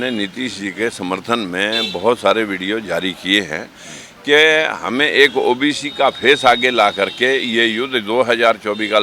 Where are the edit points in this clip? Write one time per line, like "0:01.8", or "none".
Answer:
none